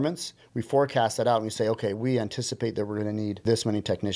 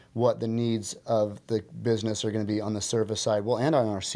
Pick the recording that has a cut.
first; 2 cuts; at 2.0 s, 3.4 s

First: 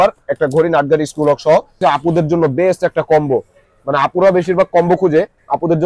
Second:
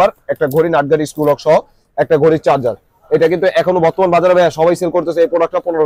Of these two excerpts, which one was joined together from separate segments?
first; 1 cut; at 1.7 s

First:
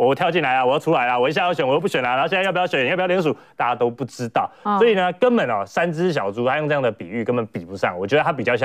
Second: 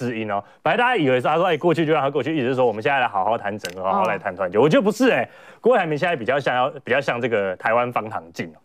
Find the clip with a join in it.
second; 1 cut; at 5.5 s

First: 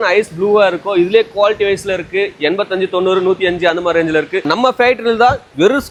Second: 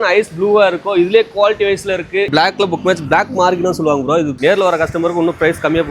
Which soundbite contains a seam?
second; 2 cuts; at 2.3 s, 4.3 s

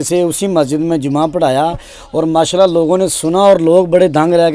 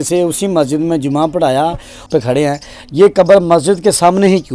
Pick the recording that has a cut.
second; 1 cut; at 2.1 s

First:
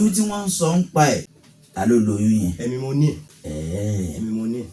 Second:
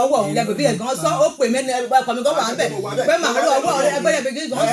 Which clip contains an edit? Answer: first; 2 cuts; at 1.4 s, 3.3 s

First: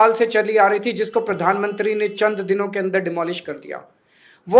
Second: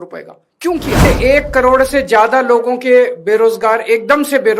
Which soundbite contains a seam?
second; 1 cut; at 1.0 s

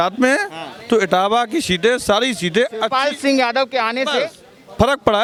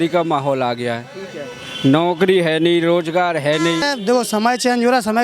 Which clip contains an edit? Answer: second; 1 cut; at 3.8 s

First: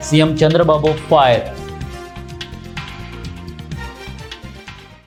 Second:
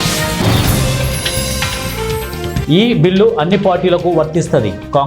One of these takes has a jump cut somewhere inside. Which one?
second; 2 cuts; at 1.2 s, 2.6 s

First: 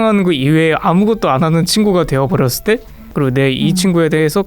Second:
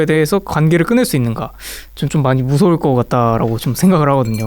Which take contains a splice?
first; 1 cut; at 3.0 s

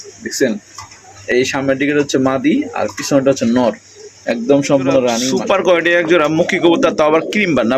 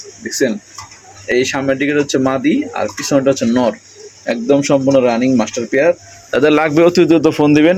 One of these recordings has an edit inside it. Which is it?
first; 1 cut; at 5.3 s

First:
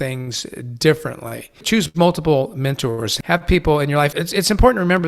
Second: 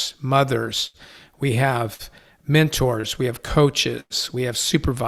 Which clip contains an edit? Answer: first; 3 cuts; at 1.6 s, 3.1 s, 4.1 s

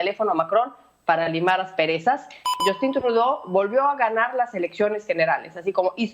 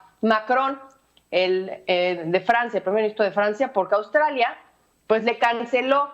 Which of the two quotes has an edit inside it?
first; 1 cut; at 2.6 s

